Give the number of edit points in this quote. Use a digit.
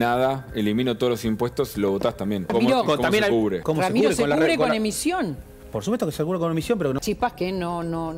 3